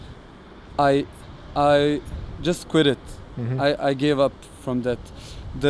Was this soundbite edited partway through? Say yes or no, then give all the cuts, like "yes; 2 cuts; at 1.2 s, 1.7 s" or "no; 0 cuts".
no; 0 cuts